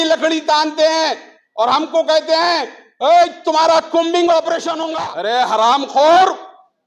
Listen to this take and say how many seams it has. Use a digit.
1